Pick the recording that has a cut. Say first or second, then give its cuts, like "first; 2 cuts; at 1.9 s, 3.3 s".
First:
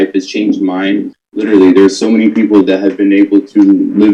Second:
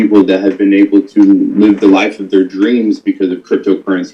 first; 1 cut; at 1.2 s